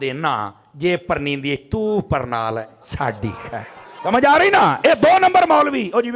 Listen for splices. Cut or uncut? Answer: cut